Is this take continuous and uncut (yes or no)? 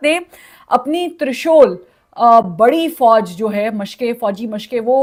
yes